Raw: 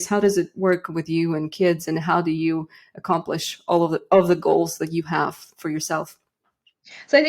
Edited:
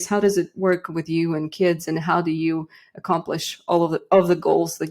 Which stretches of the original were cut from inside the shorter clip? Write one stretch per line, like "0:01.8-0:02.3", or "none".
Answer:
none